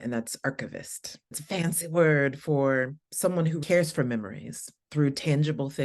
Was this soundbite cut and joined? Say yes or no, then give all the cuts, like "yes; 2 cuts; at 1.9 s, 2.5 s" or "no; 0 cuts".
yes; 2 cuts; at 1.4 s, 3.6 s